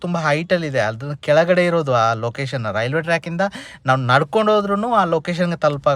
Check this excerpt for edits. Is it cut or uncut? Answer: uncut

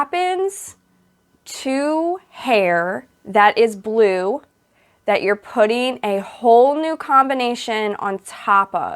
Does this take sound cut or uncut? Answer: uncut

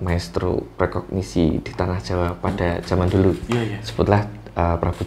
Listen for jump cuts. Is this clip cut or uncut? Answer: uncut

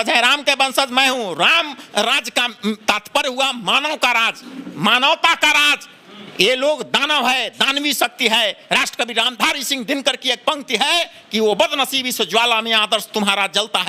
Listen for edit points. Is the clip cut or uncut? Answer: uncut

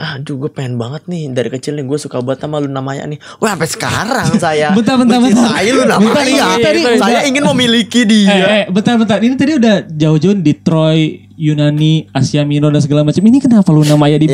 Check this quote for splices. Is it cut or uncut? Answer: uncut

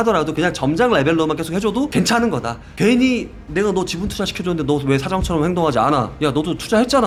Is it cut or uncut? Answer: uncut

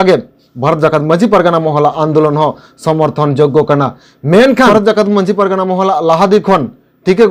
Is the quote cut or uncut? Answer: cut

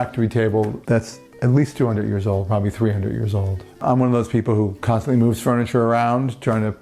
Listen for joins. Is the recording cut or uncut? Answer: cut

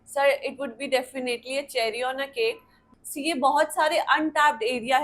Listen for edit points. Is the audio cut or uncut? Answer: cut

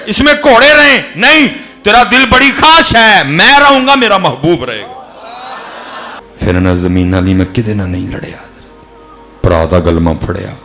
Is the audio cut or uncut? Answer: cut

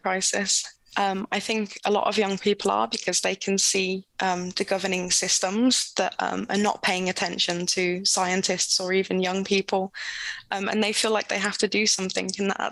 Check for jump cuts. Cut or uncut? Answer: uncut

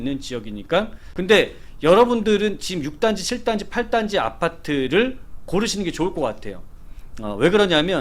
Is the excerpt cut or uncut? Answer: cut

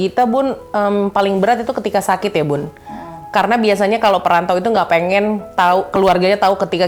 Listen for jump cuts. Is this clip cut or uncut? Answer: uncut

